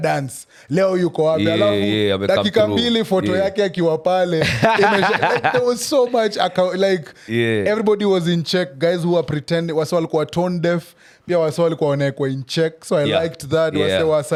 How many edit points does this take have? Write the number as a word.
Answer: zero